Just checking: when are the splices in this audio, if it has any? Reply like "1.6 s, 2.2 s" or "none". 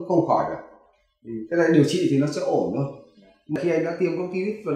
3.6 s